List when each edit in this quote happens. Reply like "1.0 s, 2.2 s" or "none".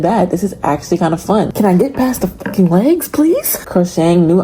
1.5 s, 3.5 s